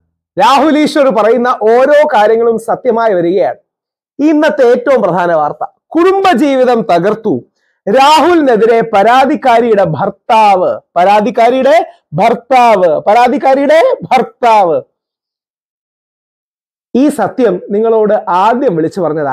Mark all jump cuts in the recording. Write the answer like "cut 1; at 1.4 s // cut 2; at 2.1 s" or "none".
none